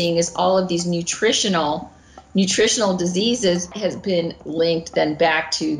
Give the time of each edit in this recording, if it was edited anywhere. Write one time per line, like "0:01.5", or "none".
0:03.7